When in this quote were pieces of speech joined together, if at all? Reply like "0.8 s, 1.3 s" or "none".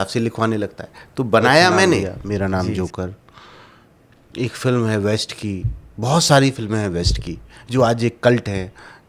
2.1 s